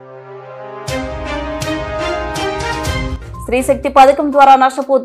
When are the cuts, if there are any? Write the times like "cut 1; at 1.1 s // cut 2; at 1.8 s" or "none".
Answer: cut 1; at 3.1 s